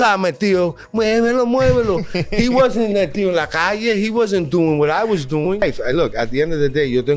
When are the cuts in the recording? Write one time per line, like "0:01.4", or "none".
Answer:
0:05.6